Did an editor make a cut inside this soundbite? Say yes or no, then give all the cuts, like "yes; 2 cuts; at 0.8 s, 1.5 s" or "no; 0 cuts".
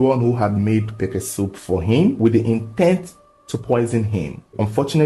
yes; 1 cut; at 2.2 s